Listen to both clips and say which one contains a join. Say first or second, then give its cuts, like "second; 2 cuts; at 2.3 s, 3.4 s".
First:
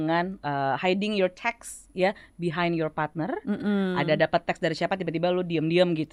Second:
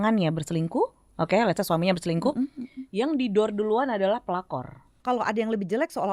second; 1 cut; at 4.9 s